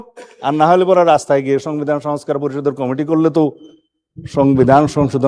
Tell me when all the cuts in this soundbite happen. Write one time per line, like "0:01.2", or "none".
none